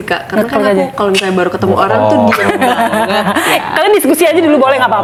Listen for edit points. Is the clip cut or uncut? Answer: uncut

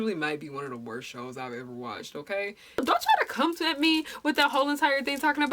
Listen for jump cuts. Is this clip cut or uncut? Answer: cut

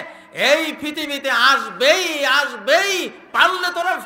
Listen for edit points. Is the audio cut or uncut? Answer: uncut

